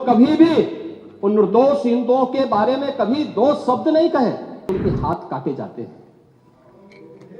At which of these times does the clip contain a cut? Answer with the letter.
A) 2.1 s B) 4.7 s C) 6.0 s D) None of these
B